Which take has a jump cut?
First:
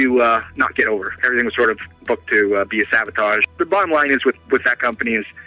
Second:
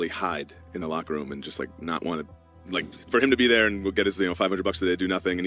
first; 1 cut; at 1.2 s

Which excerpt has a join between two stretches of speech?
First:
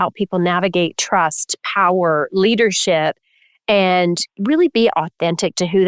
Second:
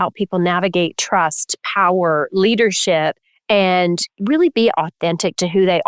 second; 1 cut; at 3.3 s

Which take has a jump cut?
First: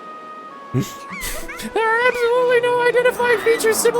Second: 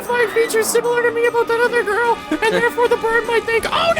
first; 1 cut; at 1.6 s

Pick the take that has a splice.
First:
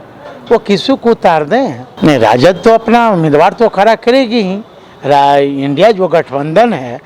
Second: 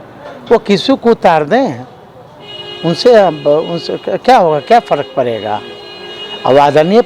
first; 1 cut; at 1.8 s

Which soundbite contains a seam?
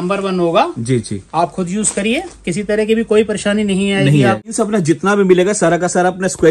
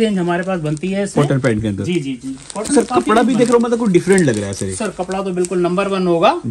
first; 1 cut; at 4.5 s

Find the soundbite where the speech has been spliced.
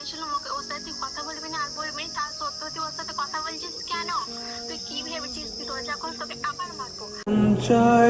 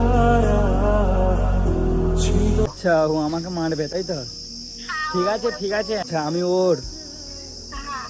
second; 2 cuts; at 2.7 s, 6.0 s

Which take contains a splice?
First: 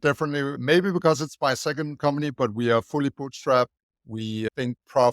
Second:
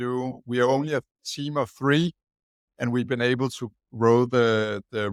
first; 1 cut; at 2.3 s

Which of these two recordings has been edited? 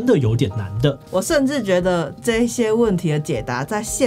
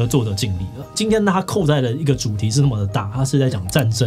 first; 1 cut; at 1.0 s

